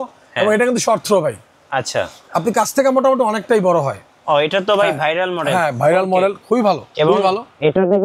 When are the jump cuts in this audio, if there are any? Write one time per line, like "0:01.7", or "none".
0:04.1